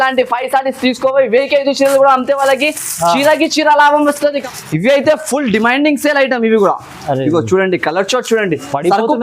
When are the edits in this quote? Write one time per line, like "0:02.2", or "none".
0:04.4